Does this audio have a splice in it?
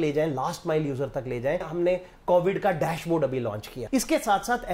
yes; 2 cuts; at 1.7 s, 3.8 s

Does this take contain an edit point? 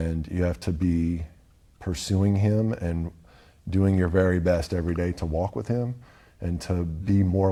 no; 0 cuts

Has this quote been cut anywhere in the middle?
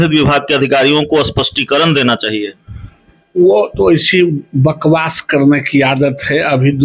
no; 0 cuts

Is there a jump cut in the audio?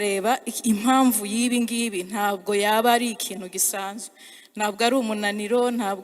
no; 0 cuts

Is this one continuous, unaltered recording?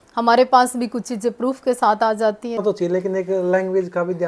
no; 1 cut; at 2.6 s

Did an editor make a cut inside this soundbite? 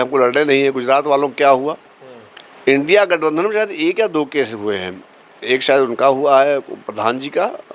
no; 0 cuts

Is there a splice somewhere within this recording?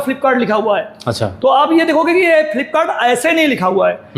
no; 0 cuts

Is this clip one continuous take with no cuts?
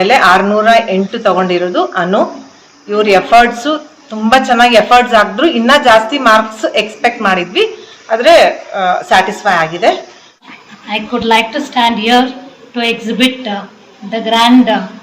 no; 1 cut; at 10.5 s

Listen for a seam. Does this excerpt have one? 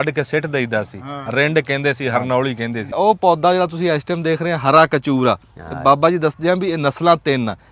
yes; 1 cut; at 3.0 s

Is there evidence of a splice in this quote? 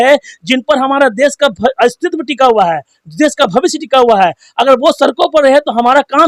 no; 0 cuts

